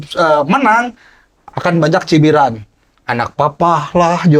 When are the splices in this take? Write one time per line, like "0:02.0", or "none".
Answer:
none

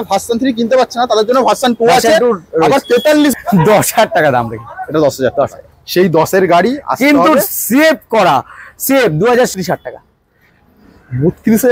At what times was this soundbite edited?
0:03.3
0:09.6

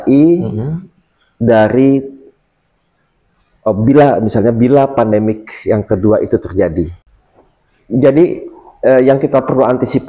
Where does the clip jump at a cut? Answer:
0:07.0

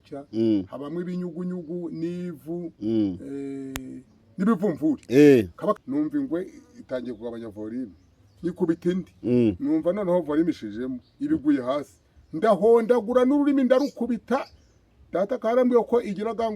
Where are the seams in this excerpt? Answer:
0:05.8

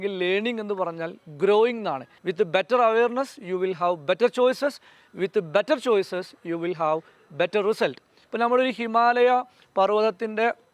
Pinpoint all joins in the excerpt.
0:02.2
0:08.2

